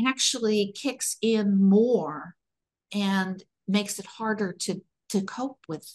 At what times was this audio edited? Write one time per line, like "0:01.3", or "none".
none